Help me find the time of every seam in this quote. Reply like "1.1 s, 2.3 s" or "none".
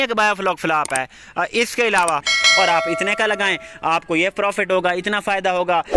2.3 s